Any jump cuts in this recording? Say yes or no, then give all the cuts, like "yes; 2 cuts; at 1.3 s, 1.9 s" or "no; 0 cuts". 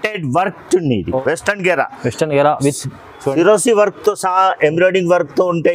yes; 1 cut; at 1.2 s